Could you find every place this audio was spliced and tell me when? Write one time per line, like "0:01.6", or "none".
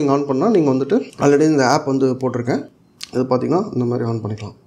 0:02.7